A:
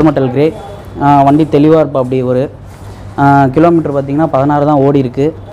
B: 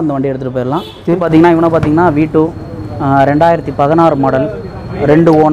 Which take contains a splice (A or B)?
B